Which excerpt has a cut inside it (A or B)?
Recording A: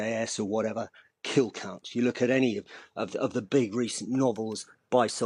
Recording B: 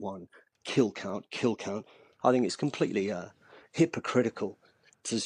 B